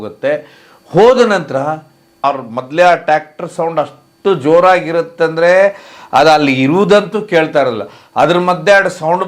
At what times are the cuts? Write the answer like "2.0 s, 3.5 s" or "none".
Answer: 2.2 s

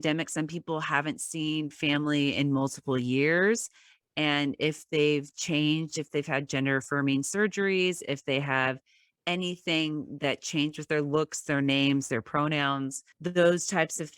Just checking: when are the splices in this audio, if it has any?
13.1 s

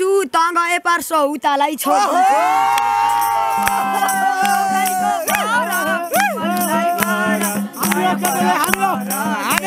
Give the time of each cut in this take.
none

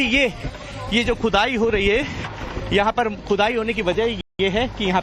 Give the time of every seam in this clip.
none

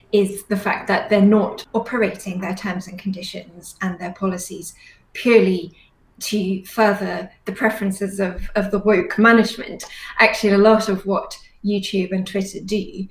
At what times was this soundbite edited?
1.6 s

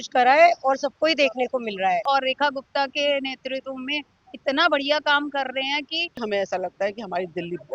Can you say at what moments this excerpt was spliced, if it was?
2.0 s, 6.2 s

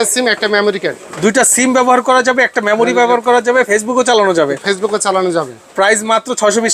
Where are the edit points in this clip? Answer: 3.7 s

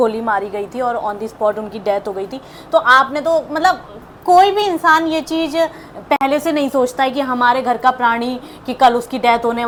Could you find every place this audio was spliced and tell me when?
none

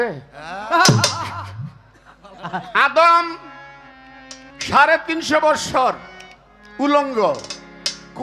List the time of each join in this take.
2.7 s

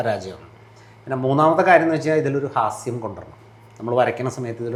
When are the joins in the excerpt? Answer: none

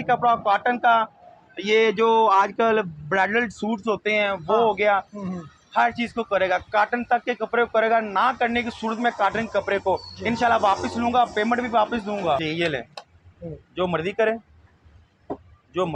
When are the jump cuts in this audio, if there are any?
12.4 s

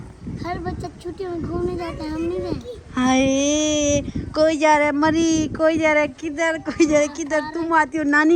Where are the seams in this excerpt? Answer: none

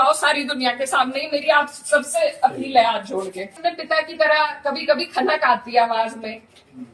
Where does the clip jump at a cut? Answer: 3.6 s

